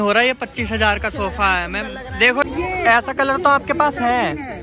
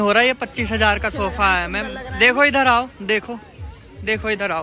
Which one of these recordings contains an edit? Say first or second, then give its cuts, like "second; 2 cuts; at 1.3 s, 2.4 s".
first; 1 cut; at 2.4 s